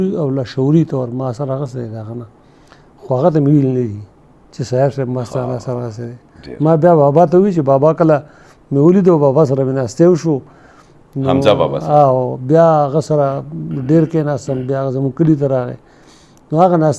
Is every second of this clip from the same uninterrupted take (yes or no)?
yes